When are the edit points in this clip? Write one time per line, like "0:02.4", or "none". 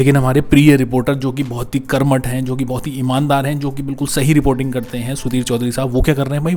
none